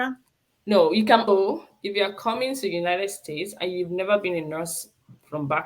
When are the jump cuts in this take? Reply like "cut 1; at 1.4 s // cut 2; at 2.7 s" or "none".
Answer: cut 1; at 1.3 s